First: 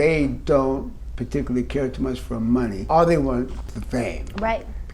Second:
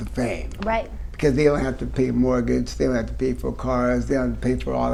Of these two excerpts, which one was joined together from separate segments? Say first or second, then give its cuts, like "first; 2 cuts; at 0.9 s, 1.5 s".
first; 1 cut; at 2.8 s